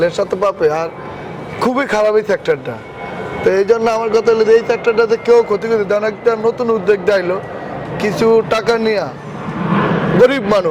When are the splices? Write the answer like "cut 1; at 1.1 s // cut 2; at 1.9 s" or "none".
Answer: none